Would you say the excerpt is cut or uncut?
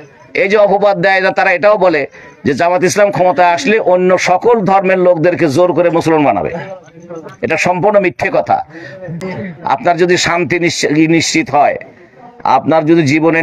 cut